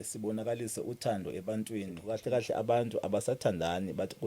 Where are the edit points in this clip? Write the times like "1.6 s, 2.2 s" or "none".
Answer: 2.1 s